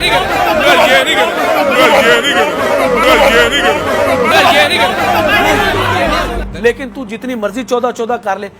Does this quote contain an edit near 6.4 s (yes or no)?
yes